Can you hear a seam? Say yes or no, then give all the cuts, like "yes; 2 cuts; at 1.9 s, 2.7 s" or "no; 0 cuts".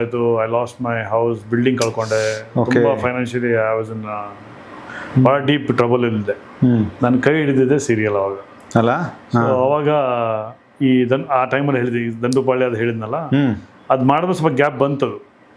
no; 0 cuts